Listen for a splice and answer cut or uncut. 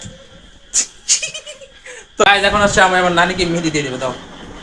cut